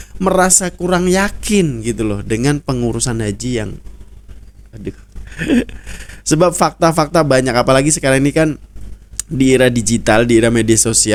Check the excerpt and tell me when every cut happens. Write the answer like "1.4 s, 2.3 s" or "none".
none